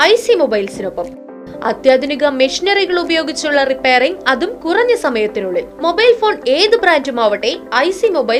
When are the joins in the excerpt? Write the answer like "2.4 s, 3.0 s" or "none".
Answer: none